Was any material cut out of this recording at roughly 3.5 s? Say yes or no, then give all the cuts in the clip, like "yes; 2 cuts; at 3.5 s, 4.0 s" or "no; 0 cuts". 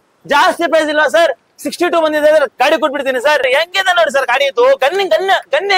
yes; 1 cut; at 3.5 s